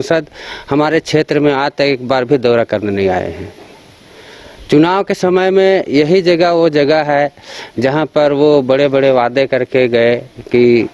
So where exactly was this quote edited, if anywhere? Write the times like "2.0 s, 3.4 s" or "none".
none